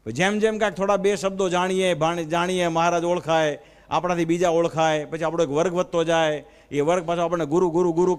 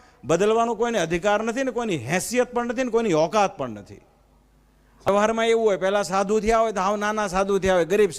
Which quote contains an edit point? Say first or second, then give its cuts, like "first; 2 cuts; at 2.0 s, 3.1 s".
second; 1 cut; at 5.1 s